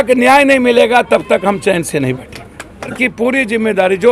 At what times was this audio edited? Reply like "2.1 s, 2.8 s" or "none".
2.9 s

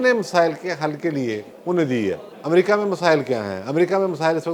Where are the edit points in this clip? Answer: 1.5 s, 2.3 s

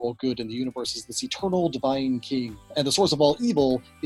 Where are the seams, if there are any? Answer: 2.7 s

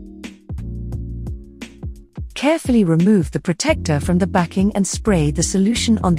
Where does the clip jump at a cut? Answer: 1.2 s, 2.3 s

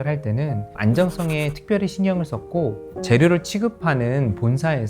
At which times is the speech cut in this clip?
2.9 s

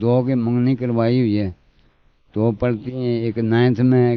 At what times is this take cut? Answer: none

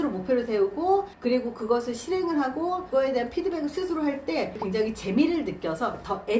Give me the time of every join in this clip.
2.9 s, 4.6 s

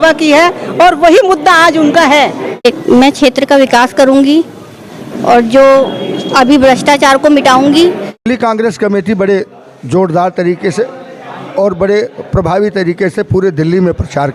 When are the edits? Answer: 2.7 s, 8.2 s

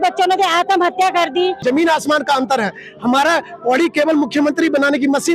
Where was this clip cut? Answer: 1.6 s

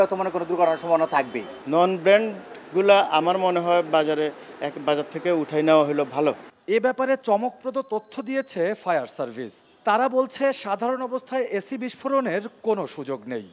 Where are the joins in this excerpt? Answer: none

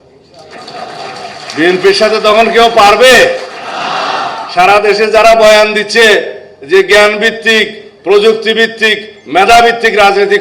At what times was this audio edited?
none

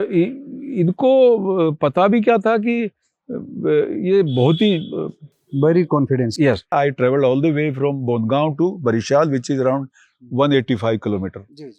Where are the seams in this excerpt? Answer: 6.6 s

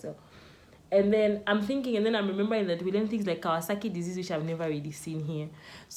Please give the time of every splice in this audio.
none

